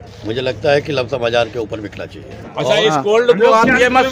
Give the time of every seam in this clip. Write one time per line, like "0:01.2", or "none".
0:02.3

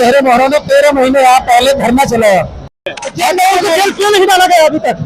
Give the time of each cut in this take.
0:02.6

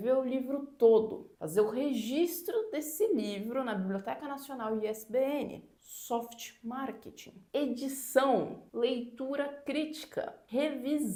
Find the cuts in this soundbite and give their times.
none

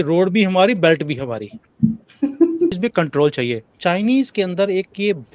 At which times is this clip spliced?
0:02.8

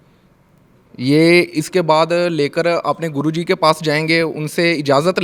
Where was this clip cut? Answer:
none

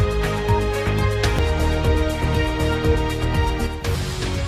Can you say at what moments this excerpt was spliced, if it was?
none

